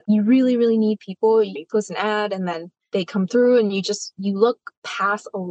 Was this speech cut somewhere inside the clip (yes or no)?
yes